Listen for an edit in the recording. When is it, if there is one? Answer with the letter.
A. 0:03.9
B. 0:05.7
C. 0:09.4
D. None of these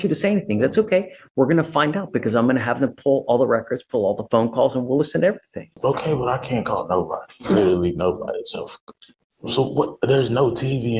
B